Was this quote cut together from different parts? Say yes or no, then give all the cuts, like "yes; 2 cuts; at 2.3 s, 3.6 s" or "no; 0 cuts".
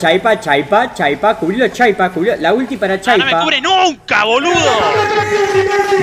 no; 0 cuts